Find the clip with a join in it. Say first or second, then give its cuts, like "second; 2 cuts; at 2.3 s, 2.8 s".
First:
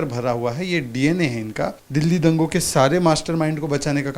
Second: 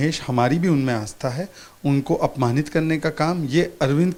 first; 1 cut; at 1.8 s